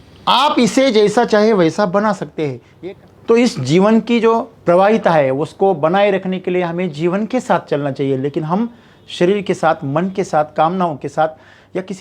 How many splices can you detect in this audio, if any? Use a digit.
2